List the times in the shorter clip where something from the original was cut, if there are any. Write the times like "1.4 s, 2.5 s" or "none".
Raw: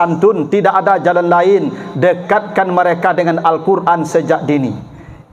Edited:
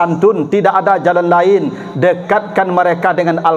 none